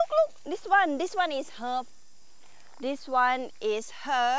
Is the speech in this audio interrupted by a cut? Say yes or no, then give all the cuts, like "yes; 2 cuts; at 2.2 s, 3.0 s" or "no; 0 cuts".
no; 0 cuts